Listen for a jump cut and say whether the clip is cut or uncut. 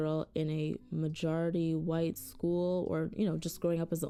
uncut